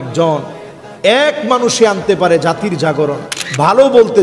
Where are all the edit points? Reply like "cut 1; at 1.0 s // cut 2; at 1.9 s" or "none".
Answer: cut 1; at 3.3 s